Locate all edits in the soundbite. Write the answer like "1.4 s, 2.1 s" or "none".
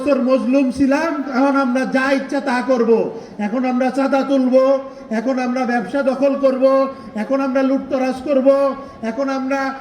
1.3 s